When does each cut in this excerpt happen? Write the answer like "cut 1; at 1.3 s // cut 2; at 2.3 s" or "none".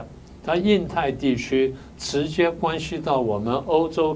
none